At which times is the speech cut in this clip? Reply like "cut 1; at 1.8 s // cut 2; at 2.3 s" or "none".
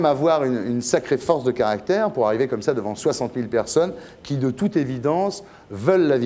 none